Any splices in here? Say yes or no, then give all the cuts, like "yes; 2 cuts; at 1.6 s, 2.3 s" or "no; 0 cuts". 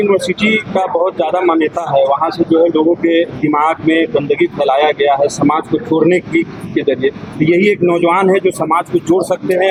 no; 0 cuts